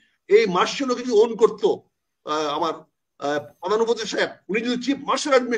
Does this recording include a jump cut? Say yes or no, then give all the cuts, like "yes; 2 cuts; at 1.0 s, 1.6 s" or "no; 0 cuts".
no; 0 cuts